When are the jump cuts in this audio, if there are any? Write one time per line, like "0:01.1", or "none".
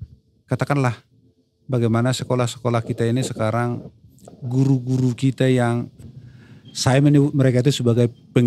0:06.0

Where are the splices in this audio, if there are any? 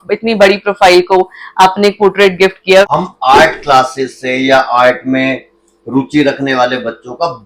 0:02.9

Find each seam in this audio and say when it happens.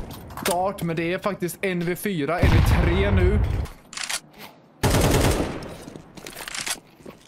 0:03.7

